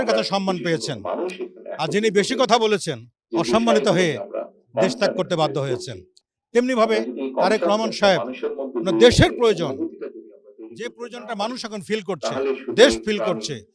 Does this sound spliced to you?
no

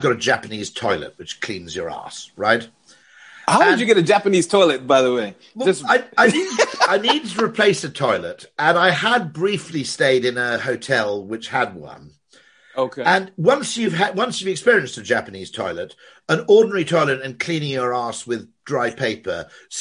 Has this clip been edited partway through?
no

